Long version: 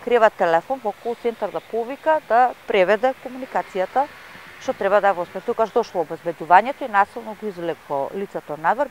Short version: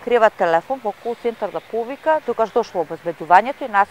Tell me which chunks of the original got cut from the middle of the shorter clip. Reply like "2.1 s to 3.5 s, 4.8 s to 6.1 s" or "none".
2.2 s to 5.4 s